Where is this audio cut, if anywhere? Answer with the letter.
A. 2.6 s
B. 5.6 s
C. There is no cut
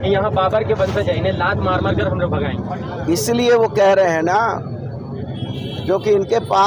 A